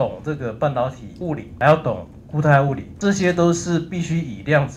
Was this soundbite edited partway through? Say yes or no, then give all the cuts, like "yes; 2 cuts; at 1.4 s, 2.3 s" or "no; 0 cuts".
yes; 2 cuts; at 1.5 s, 2.9 s